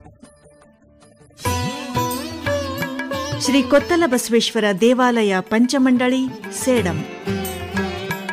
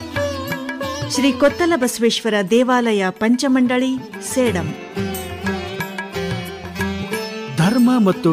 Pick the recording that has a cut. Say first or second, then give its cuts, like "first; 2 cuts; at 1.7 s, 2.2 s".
first; 1 cut; at 1.4 s